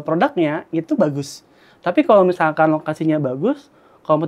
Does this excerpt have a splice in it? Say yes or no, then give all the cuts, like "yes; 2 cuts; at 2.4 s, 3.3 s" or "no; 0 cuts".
no; 0 cuts